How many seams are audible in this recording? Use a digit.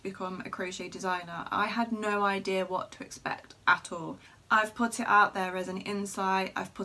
1